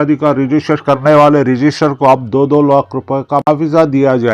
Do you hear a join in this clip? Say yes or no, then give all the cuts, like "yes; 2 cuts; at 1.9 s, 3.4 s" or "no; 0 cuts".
yes; 1 cut; at 3.5 s